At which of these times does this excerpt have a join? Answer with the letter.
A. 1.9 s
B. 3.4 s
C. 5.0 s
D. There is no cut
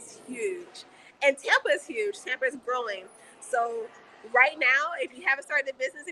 D